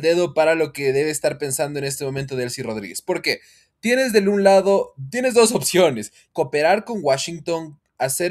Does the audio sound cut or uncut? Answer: cut